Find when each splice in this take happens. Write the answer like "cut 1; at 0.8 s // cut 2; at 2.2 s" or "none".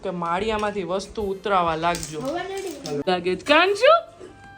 cut 1; at 3.1 s